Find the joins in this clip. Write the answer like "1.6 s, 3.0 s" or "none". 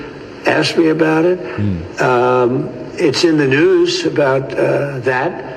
1.7 s

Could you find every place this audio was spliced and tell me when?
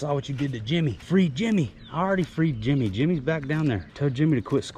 1.0 s, 3.9 s

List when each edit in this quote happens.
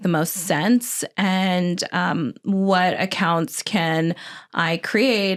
none

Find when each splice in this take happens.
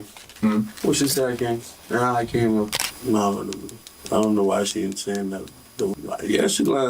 2.9 s, 5.9 s

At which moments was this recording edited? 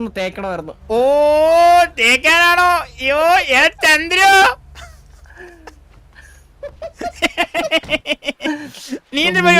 none

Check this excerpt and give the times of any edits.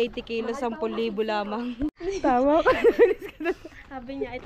2.0 s

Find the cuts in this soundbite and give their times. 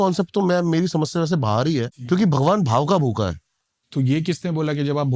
1.9 s

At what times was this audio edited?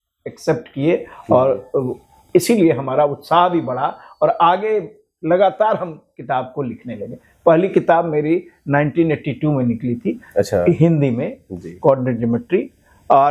none

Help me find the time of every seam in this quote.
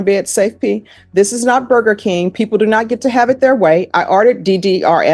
none

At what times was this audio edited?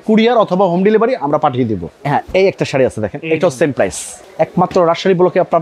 1.9 s, 4.2 s

